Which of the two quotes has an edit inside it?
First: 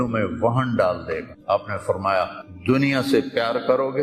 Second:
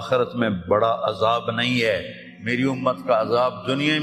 first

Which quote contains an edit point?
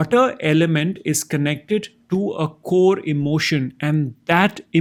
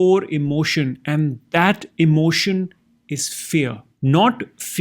second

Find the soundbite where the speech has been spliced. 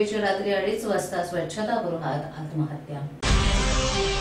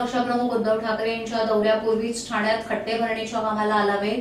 first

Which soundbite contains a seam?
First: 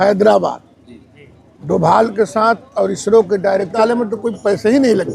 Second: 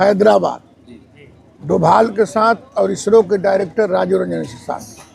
first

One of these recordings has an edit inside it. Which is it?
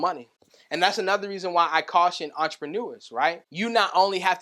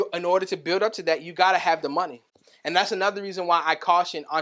first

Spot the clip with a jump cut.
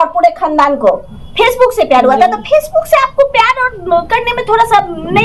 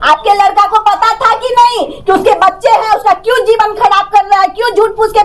first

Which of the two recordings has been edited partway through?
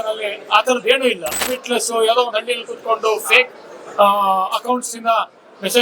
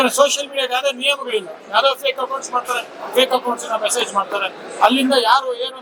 first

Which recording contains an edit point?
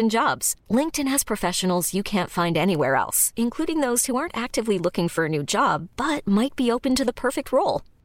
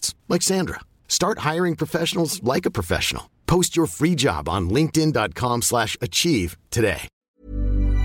second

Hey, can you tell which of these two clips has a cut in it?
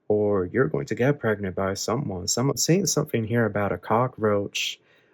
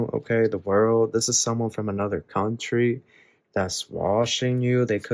first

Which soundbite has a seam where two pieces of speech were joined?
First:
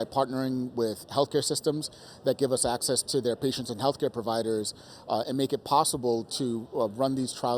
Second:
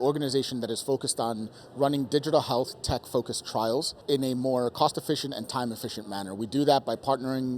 second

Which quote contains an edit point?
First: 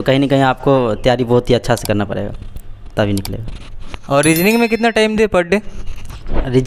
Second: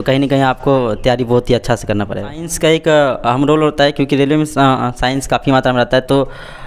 second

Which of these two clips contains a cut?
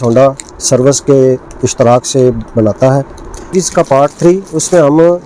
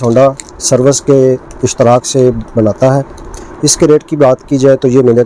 first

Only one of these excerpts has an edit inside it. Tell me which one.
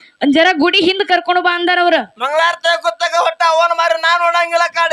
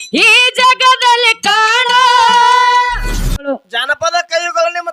second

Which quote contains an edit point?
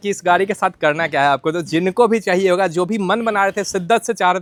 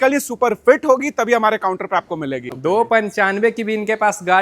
second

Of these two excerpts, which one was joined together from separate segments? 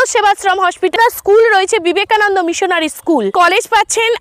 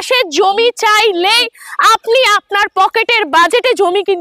first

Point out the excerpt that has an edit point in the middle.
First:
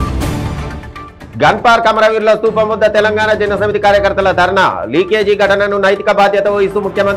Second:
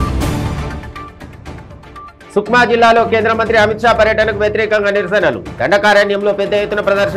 second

